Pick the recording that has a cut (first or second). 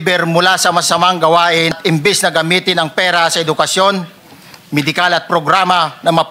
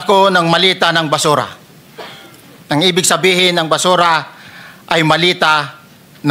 first